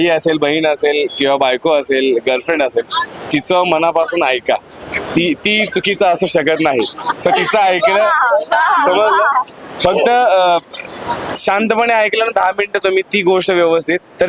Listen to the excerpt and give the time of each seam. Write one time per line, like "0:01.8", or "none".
none